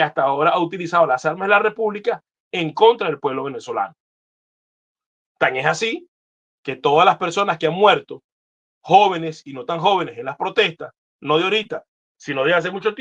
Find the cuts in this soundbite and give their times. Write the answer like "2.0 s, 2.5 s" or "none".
none